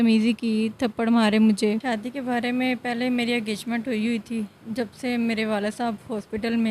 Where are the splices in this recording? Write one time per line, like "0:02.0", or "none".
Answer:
0:01.8